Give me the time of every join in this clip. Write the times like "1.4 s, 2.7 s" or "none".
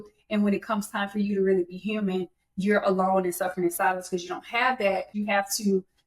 5.1 s